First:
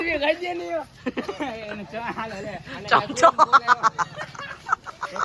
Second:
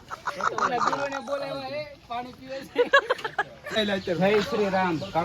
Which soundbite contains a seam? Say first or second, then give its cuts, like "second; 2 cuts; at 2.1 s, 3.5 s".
second; 1 cut; at 3.8 s